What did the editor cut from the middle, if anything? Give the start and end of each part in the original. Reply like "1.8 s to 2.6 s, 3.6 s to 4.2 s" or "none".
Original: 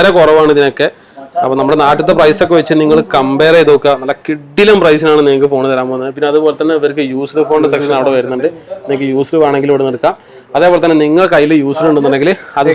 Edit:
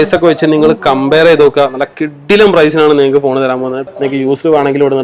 6.1 s to 8.7 s